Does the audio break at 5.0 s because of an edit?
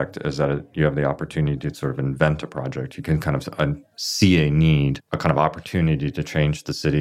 yes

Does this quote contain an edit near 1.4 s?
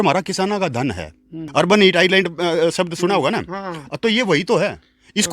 yes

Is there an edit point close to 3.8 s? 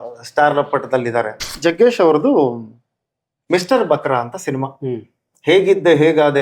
no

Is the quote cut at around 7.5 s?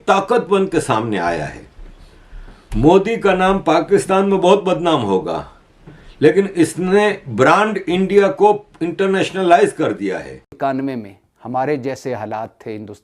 no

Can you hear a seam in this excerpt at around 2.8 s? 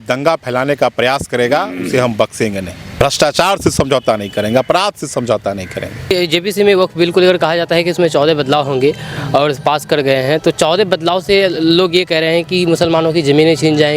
yes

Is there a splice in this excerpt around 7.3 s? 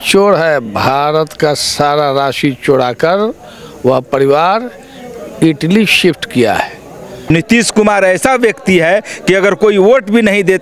yes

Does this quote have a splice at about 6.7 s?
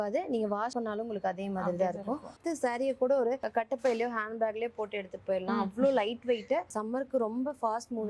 yes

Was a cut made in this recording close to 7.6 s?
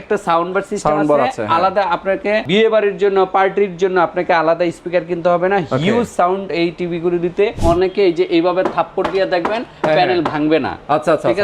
yes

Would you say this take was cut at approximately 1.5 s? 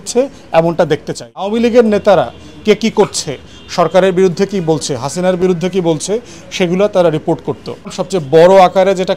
yes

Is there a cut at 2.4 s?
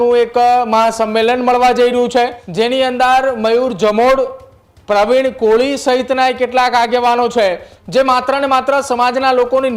yes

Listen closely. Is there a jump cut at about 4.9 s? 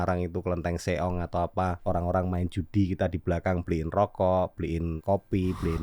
yes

